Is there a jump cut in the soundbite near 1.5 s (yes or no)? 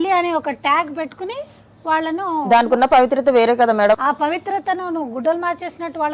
no